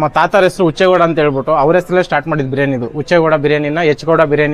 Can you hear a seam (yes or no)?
no